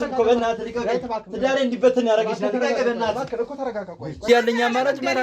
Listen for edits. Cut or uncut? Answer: cut